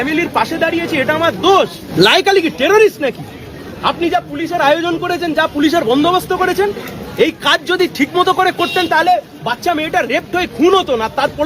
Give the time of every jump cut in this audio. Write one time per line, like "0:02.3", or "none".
0:01.8